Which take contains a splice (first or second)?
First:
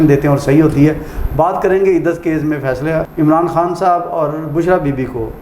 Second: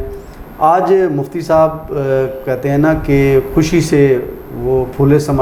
first